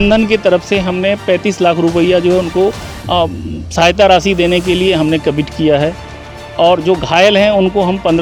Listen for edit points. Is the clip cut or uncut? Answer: uncut